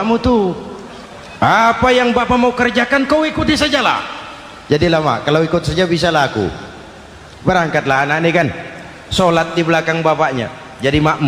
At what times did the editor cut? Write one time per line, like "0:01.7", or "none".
none